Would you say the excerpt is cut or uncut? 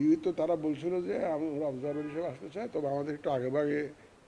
uncut